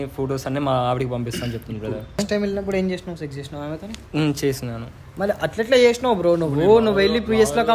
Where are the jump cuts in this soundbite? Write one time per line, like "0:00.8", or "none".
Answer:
0:02.2